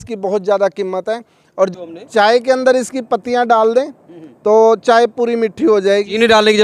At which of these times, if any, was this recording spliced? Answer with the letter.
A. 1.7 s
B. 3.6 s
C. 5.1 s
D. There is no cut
A